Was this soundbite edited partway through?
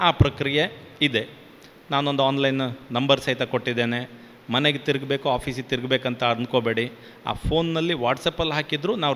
no; 0 cuts

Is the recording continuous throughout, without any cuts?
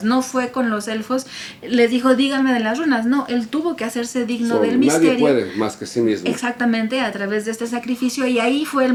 yes; 0 cuts

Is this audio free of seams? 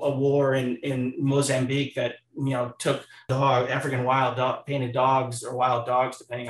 no; 1 cut; at 3.3 s

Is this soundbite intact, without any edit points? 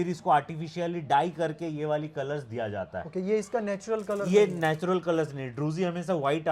yes; 0 cuts

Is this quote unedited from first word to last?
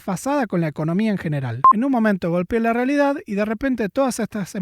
no; 1 cut; at 1.6 s

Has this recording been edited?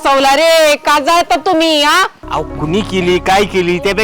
yes; 1 cut; at 2.2 s

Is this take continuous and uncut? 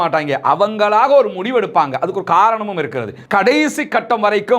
no; 1 cut; at 3.1 s

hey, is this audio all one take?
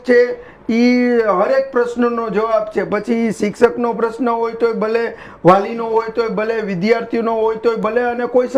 yes; 0 cuts

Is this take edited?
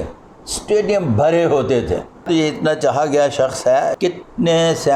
yes; 2 cuts; at 2.2 s, 3.9 s

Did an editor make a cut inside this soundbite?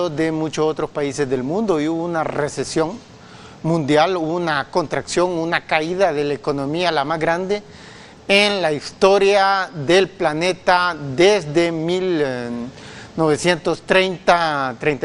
no; 0 cuts

